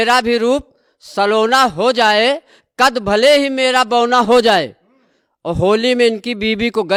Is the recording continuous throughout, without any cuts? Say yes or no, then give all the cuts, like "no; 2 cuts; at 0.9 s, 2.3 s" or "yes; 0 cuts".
yes; 0 cuts